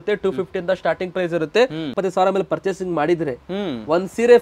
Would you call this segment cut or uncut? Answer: cut